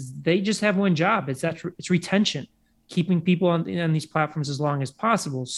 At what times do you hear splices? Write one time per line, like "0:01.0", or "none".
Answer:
none